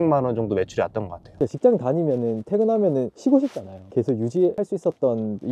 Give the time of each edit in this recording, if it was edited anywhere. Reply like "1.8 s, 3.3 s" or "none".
1.3 s, 3.1 s, 4.5 s

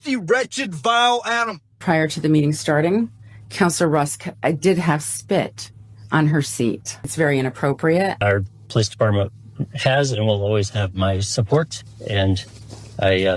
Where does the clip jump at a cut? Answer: 1.8 s, 7.1 s, 8.2 s

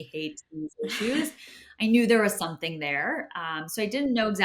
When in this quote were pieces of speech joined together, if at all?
none

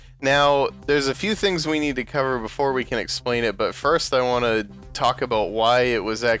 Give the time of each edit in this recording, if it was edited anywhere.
1.0 s

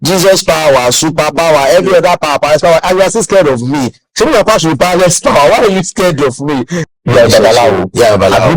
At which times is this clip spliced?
6.8 s

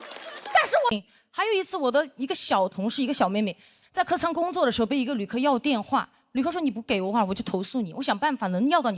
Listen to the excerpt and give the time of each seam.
0.9 s

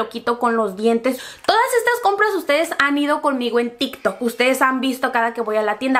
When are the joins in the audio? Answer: 1.2 s

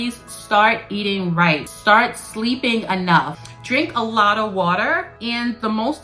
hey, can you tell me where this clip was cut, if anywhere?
1.7 s, 3.4 s, 5.1 s

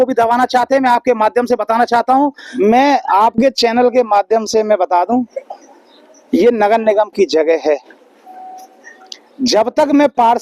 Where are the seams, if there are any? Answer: 2.5 s

